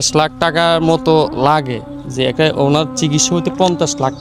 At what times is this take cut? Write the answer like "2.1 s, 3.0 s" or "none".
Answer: none